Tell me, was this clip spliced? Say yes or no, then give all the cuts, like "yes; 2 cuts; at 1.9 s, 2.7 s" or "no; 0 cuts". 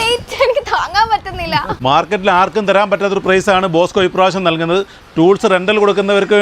yes; 1 cut; at 1.8 s